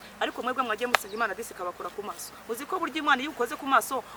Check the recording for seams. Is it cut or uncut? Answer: uncut